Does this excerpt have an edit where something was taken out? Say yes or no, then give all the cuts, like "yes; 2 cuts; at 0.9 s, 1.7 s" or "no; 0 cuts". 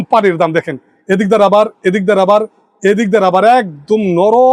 no; 0 cuts